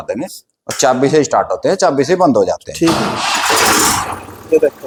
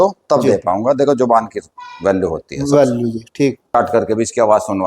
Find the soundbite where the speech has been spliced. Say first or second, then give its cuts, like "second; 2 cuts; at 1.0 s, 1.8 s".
second; 1 cut; at 3.7 s